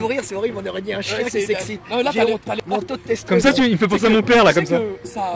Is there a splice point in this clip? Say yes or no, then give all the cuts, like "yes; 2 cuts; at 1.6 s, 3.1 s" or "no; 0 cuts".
yes; 1 cut; at 2.6 s